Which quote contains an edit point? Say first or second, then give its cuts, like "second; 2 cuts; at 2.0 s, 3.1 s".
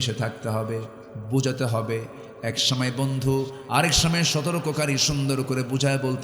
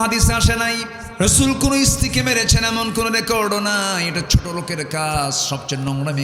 second; 1 cut; at 1.0 s